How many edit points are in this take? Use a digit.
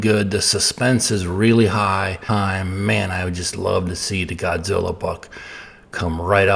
1